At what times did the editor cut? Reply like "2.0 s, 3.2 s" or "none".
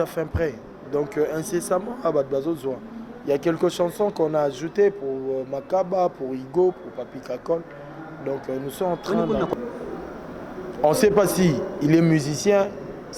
9.5 s